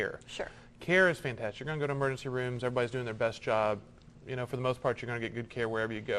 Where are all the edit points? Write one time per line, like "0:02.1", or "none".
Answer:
none